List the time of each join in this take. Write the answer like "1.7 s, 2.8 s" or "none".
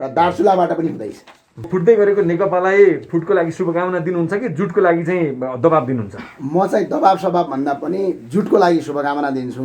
1.7 s